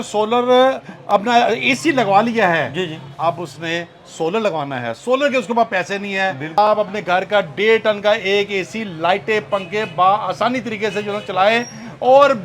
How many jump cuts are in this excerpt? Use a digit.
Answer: 1